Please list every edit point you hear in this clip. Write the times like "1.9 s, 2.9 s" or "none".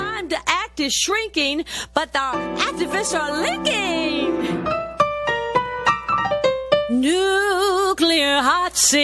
none